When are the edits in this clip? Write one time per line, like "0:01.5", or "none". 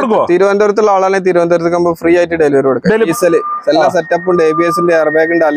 0:03.1